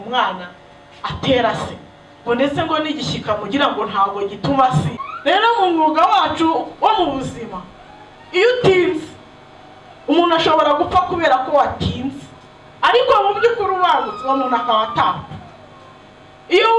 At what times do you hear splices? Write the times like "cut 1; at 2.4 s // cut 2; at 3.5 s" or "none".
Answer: cut 1; at 5.0 s